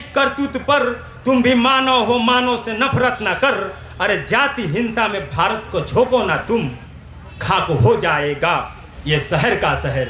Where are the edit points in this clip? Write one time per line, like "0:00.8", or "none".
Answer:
none